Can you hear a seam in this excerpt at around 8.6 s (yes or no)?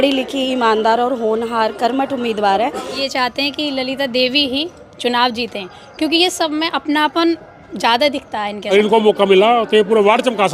yes